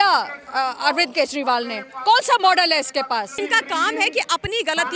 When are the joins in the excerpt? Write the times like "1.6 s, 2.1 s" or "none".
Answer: 3.4 s

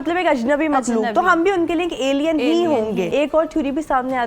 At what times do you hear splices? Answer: 3.1 s

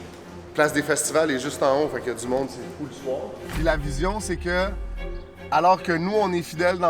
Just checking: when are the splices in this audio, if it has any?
3.6 s

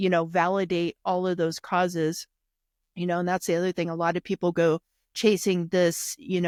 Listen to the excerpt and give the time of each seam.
none

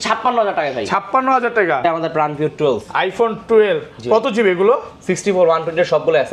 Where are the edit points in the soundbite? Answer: 1.8 s

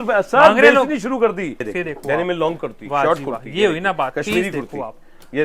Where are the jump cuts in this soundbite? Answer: 1.6 s

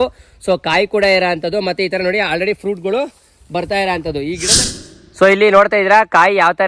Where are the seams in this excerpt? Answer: 4.4 s

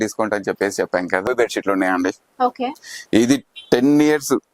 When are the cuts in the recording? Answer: 1.2 s

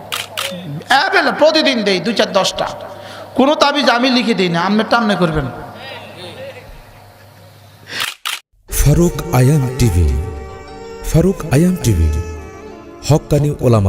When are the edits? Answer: 8.1 s

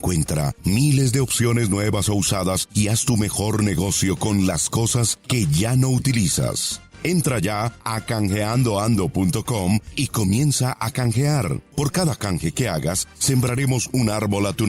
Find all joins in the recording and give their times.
none

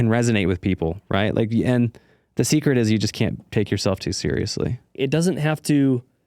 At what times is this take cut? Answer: 4.9 s

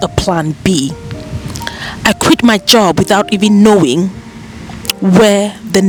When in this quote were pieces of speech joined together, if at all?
none

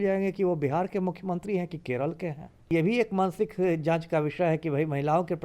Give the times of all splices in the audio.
2.7 s

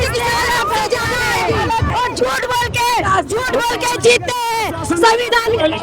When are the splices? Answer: 1.9 s

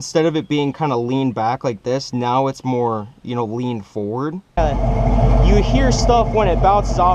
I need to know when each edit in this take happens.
4.6 s

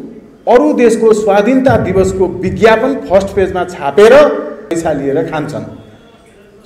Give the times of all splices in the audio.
4.7 s

